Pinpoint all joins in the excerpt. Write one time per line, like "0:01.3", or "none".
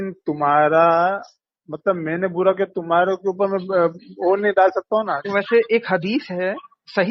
0:05.2